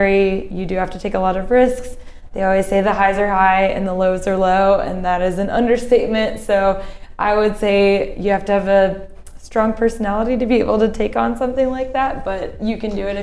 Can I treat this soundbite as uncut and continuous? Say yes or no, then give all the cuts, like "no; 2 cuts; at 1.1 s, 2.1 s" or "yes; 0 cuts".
yes; 0 cuts